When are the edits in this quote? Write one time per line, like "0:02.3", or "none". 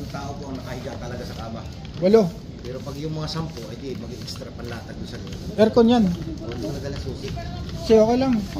none